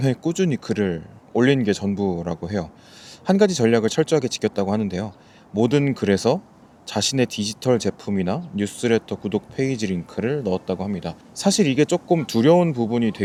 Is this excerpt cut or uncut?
uncut